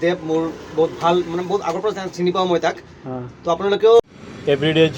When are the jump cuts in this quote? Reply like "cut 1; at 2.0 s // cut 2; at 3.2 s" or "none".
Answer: cut 1; at 4.0 s

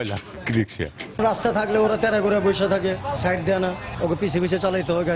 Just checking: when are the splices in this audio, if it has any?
cut 1; at 1.0 s

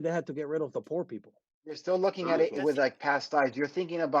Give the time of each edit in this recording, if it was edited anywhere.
cut 1; at 1.8 s

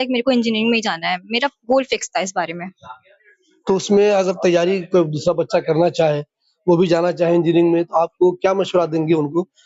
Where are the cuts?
none

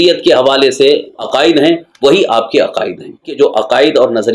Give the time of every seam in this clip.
cut 1; at 1.2 s // cut 2; at 3.3 s

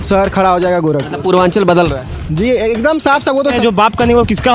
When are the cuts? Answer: cut 1; at 3.6 s

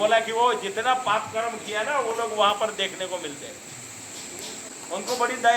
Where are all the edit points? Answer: cut 1; at 4.6 s

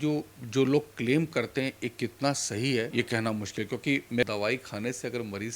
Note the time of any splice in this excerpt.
cut 1; at 4.2 s

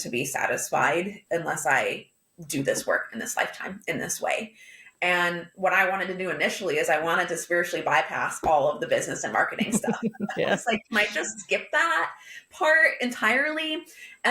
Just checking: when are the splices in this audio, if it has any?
cut 1; at 1.2 s

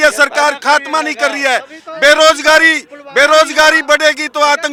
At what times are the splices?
none

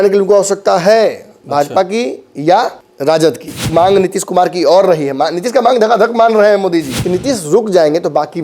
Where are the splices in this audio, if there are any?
cut 1; at 2.9 s // cut 2; at 3.7 s // cut 3; at 7.0 s

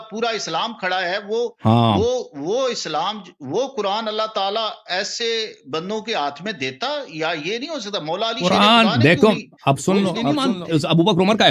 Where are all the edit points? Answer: cut 1; at 10.4 s

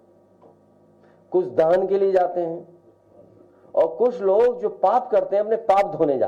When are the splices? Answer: cut 1; at 3.9 s

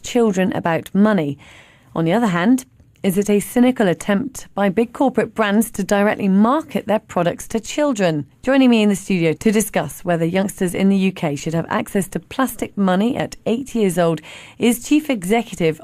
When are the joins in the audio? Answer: cut 1; at 8.3 s

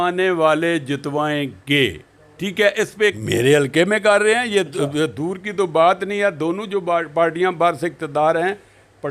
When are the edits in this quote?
cut 1; at 3.2 s

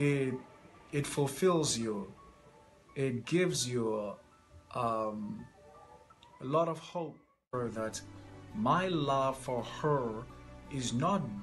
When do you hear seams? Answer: cut 1; at 7.5 s

